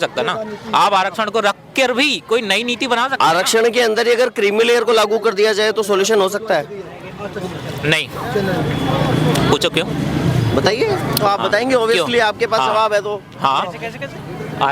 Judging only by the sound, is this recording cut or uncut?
uncut